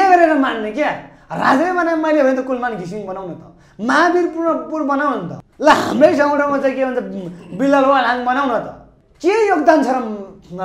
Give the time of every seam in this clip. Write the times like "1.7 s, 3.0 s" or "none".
none